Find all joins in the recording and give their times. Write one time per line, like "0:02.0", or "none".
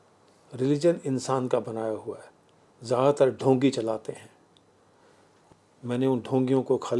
0:05.5